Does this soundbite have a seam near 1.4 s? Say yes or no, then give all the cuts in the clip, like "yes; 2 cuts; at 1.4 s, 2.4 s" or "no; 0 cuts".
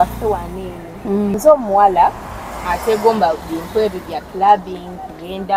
yes; 1 cut; at 1.4 s